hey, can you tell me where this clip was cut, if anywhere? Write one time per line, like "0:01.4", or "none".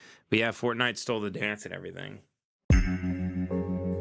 0:02.6

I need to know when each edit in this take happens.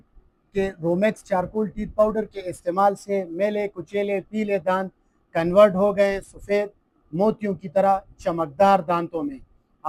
none

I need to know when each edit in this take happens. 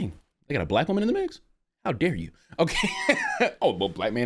none

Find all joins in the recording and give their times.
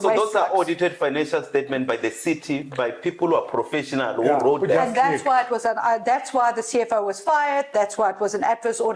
none

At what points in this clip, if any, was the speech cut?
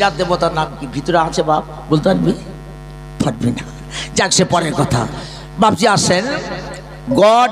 none

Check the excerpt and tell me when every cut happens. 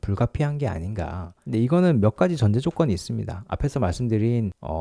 0:01.2

